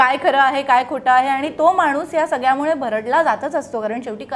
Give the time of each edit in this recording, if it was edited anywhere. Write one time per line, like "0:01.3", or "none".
none